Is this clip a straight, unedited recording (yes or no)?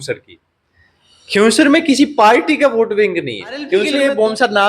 no